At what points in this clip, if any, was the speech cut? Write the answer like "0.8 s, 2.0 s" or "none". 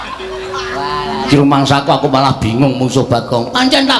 1.2 s